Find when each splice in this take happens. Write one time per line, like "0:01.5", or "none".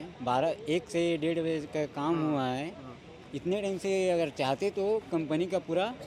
none